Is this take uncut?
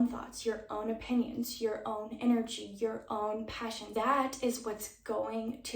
no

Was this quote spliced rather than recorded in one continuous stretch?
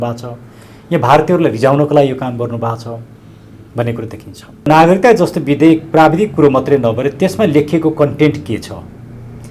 yes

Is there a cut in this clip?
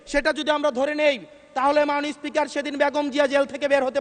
no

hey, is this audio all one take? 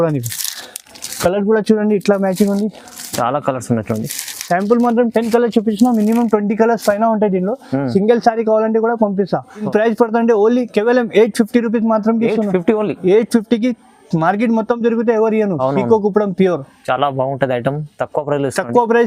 yes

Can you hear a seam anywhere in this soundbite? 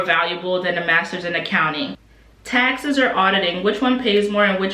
yes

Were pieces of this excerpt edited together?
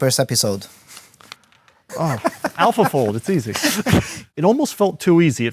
yes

